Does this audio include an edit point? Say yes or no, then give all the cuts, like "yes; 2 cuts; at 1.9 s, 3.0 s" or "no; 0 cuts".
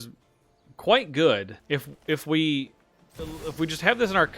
yes; 1 cut; at 1.5 s